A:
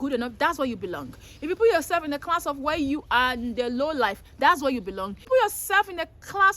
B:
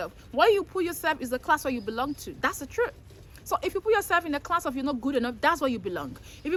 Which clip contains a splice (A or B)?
A